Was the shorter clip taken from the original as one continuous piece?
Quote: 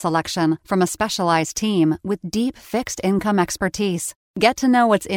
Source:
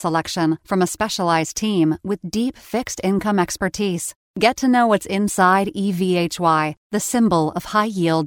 yes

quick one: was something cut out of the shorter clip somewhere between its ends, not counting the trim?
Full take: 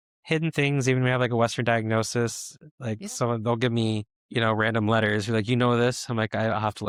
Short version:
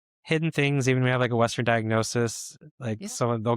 no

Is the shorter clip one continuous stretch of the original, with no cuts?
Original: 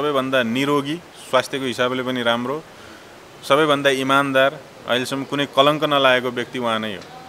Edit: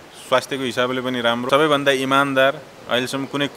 no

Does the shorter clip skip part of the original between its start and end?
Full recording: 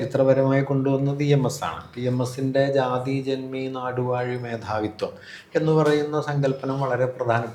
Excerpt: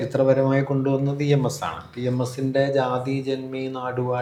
no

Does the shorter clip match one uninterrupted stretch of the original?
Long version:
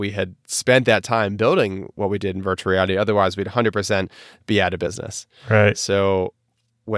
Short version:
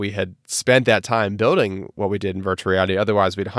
yes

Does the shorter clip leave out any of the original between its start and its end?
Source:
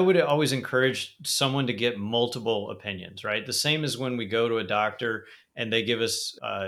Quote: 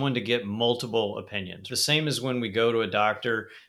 yes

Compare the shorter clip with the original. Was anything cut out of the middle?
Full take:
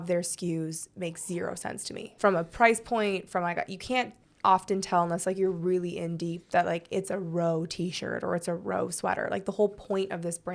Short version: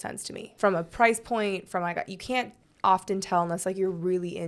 no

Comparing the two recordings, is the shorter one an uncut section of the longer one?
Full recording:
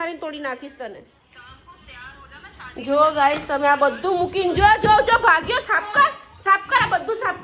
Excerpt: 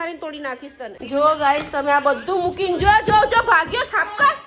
no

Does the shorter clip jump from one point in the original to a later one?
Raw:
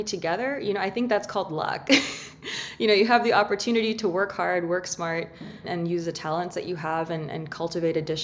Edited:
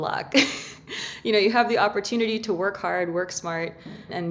no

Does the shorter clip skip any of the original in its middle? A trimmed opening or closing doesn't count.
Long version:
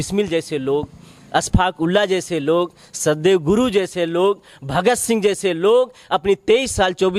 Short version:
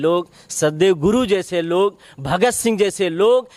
no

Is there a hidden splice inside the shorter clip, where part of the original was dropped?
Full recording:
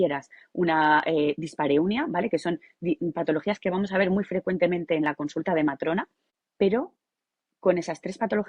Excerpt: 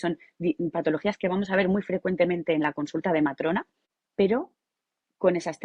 no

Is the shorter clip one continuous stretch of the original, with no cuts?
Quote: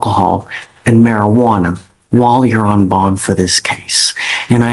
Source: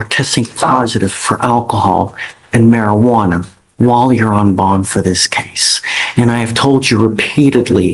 yes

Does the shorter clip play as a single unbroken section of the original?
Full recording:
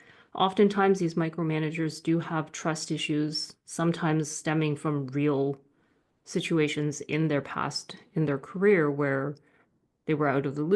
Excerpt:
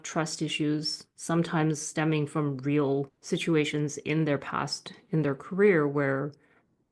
no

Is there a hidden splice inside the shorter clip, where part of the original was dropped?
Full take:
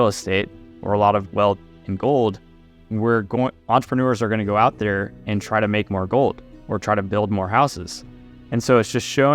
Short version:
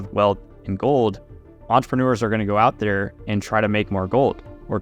yes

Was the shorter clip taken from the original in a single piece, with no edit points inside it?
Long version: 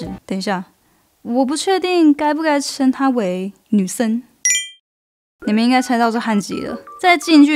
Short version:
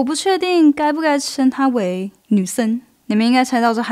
no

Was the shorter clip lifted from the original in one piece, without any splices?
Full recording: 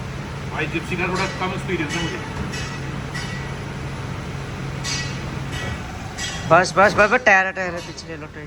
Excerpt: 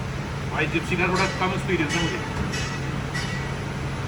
yes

